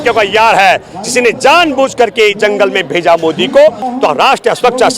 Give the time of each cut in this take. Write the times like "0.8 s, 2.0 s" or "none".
3.8 s

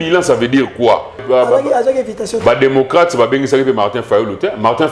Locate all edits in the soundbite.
1.2 s

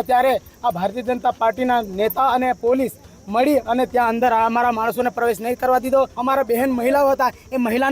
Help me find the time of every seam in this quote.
6.1 s

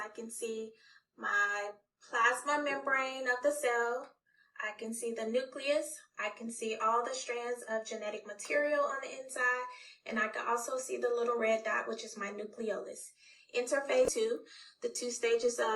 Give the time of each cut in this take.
14.1 s

